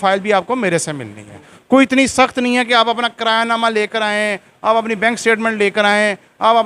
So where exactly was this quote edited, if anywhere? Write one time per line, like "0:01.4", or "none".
0:01.5